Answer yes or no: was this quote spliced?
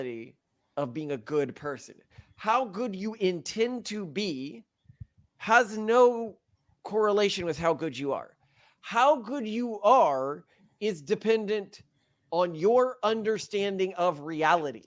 no